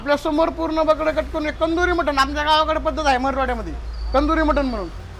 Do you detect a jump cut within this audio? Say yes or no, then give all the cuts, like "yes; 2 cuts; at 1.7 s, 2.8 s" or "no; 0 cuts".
no; 0 cuts